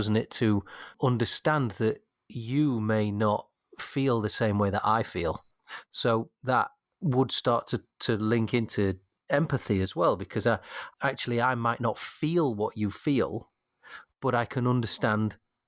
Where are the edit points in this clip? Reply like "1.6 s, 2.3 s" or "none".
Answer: 0.9 s, 5.6 s, 10.8 s

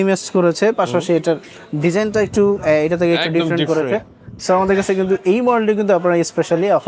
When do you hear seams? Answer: none

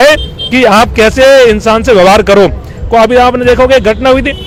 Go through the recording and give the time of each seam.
none

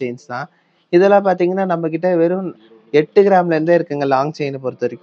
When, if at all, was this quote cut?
none

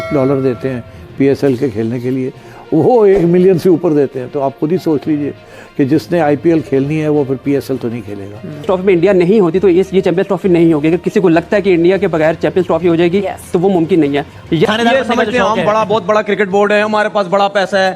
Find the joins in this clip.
8.7 s, 14.7 s

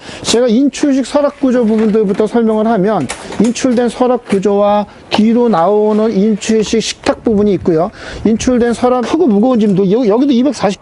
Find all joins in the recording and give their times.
9.1 s

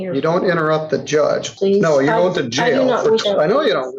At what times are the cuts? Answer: 1.5 s, 3.2 s

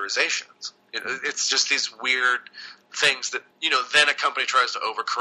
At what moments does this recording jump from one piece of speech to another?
3.5 s

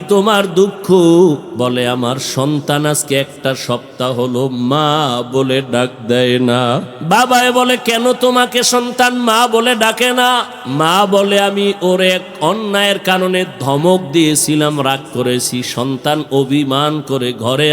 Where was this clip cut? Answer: 1.5 s, 6.9 s, 10.6 s

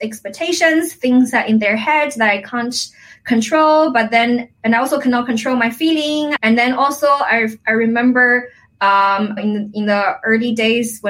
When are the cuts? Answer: 4.5 s, 6.3 s, 9.4 s

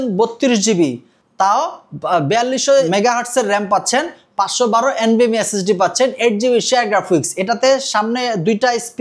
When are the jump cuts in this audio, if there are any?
2.9 s

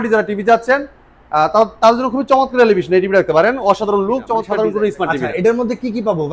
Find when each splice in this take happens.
4.5 s

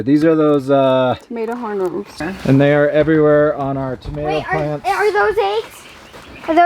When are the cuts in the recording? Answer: 2.1 s

